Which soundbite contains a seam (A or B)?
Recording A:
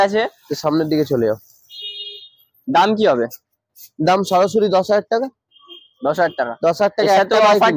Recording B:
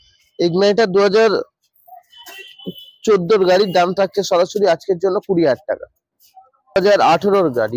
B